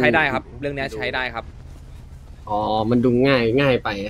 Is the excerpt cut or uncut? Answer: uncut